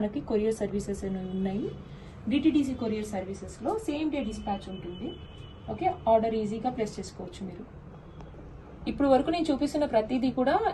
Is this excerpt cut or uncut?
uncut